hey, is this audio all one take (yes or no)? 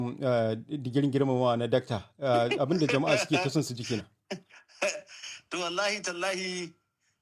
yes